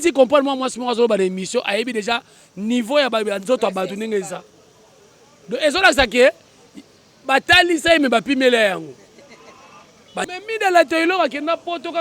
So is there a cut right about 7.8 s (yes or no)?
no